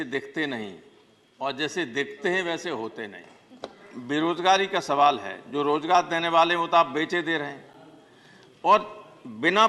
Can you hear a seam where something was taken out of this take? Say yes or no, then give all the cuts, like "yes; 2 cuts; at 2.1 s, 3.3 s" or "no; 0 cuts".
yes; 1 cut; at 3.9 s